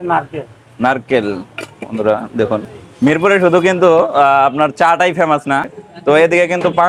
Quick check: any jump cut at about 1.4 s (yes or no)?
no